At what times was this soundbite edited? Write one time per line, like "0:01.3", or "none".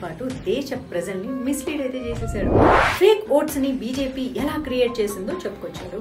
0:02.7